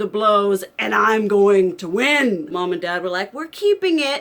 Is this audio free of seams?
no; 1 cut; at 2.5 s

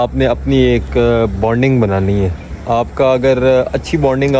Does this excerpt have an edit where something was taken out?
no; 0 cuts

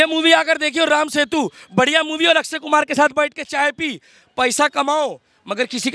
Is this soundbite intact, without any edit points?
yes; 0 cuts

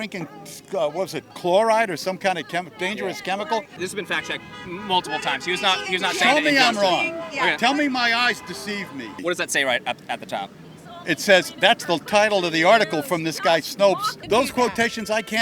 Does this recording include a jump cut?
yes; 3 cuts; at 3.7 s, 9.2 s, 14.1 s

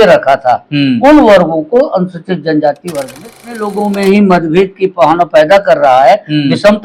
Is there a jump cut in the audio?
yes; 1 cut; at 3.3 s

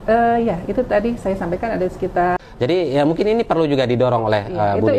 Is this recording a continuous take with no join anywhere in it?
no; 1 cut; at 2.4 s

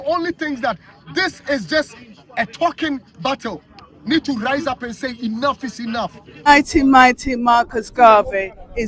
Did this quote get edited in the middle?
yes; 1 cut; at 6.5 s

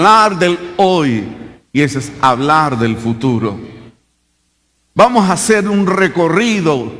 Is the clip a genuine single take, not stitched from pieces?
yes; 0 cuts

